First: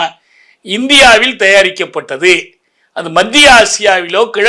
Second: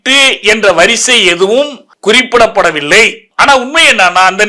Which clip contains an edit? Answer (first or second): second